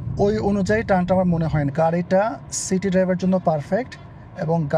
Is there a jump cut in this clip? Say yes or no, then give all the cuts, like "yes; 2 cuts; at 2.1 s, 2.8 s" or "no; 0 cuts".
yes; 1 cut; at 1.7 s